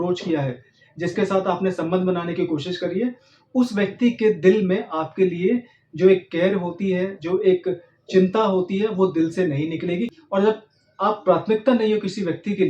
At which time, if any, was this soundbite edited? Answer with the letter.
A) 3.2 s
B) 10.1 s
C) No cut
B